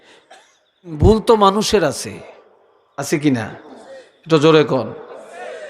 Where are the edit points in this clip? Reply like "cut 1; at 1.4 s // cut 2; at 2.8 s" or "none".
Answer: cut 1; at 1.0 s